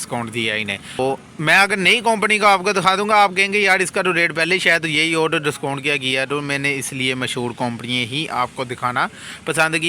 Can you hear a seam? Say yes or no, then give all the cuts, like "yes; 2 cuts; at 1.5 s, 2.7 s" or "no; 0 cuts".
yes; 1 cut; at 1.0 s